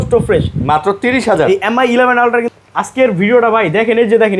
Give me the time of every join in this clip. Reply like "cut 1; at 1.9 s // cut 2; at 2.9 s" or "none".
cut 1; at 2.6 s